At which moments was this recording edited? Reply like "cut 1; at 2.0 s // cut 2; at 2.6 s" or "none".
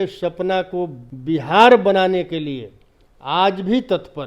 cut 1; at 1.1 s